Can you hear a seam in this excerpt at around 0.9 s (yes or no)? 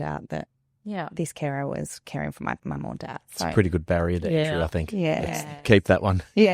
no